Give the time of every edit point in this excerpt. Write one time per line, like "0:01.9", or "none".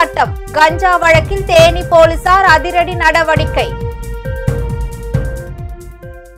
none